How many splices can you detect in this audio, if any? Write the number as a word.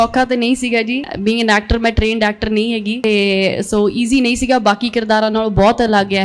two